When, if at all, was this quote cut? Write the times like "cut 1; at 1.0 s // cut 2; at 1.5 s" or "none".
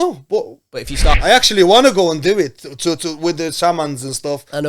cut 1; at 1.2 s